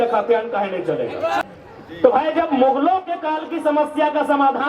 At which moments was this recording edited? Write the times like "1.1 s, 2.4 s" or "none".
1.4 s